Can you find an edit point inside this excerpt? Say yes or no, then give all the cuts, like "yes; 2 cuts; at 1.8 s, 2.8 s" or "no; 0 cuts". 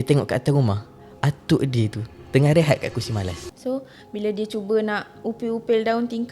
yes; 1 cut; at 3.4 s